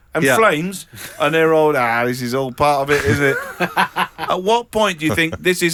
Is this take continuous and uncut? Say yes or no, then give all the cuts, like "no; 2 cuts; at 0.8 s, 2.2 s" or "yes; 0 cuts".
yes; 0 cuts